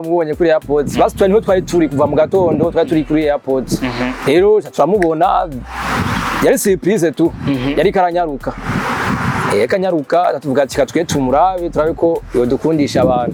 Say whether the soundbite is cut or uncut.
uncut